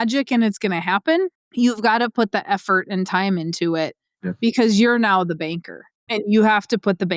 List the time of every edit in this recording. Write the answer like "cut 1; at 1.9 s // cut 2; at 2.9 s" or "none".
cut 1; at 1.4 s // cut 2; at 6.1 s